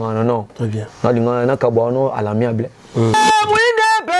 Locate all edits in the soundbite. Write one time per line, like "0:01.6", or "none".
0:03.1